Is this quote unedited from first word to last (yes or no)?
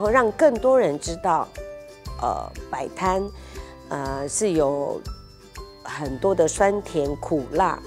yes